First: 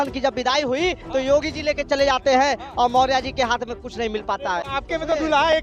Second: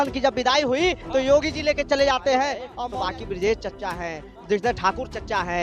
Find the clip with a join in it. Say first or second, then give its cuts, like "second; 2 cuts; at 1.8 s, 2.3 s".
second; 1 cut; at 2.7 s